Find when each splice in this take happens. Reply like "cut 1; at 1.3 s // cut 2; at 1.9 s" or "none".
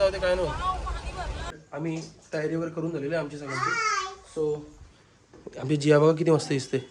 cut 1; at 1.6 s